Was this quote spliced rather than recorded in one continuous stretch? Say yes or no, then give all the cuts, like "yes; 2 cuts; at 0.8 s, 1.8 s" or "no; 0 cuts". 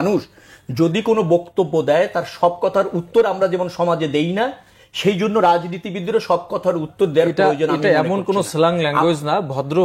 no; 0 cuts